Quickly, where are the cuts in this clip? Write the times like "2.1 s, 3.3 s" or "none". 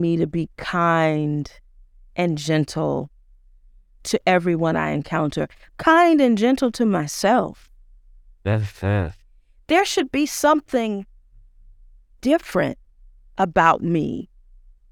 none